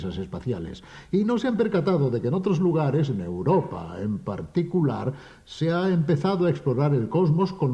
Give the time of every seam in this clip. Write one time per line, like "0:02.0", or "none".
0:02.3